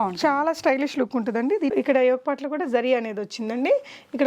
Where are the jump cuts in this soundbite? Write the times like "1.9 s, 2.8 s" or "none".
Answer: 1.7 s